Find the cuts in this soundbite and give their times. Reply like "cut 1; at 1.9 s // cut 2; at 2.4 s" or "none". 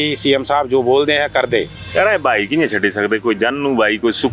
none